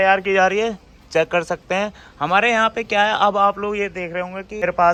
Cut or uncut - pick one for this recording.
uncut